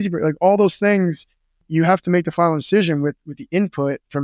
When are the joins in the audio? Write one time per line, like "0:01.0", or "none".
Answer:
0:01.6